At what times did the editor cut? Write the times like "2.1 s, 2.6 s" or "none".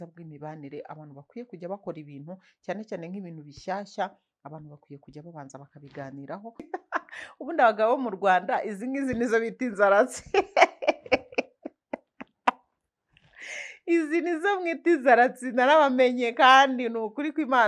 6.7 s